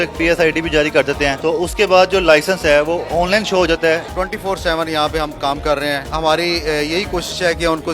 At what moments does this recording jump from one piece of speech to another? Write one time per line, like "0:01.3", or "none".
0:01.4
0:04.1
0:06.1

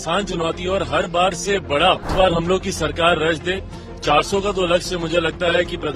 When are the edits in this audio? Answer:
0:02.1

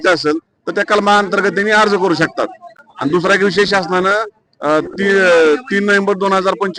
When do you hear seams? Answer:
none

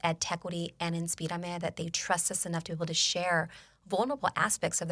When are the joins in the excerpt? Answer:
none

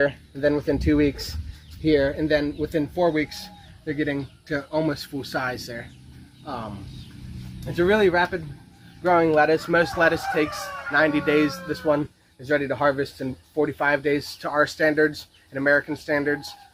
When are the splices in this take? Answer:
none

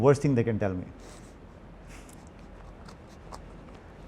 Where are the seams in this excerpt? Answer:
none

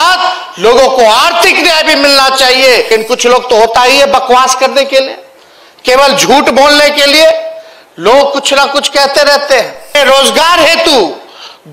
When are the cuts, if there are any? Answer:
0:02.9
0:09.9

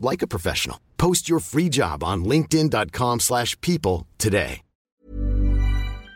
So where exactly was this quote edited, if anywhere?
0:04.9

